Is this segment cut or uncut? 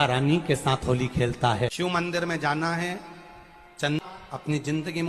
cut